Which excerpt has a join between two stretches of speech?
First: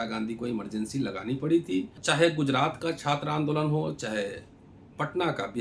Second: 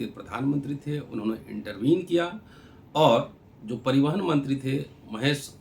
first; 1 cut; at 2.0 s

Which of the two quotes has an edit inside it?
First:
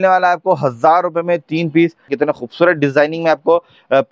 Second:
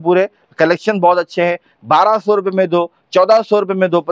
first; 1 cut; at 2.0 s

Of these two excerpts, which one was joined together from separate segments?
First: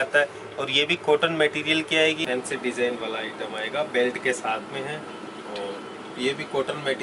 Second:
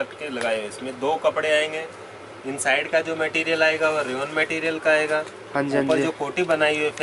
first; 1 cut; at 2.2 s

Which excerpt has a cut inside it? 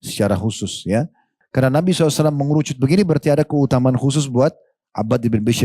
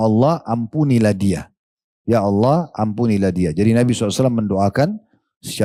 first; 1 cut; at 1.4 s

